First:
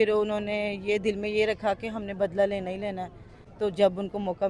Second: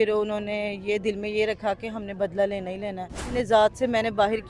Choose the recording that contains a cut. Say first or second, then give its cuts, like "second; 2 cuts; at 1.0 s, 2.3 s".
second; 1 cut; at 3.3 s